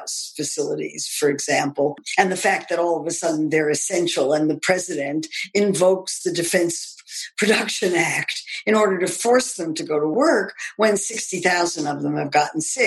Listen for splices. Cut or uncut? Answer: cut